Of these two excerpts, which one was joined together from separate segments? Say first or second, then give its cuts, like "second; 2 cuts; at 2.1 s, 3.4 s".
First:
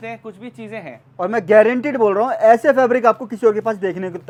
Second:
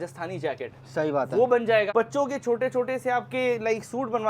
second; 1 cut; at 1.9 s